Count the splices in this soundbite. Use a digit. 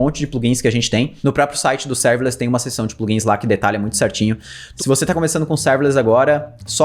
2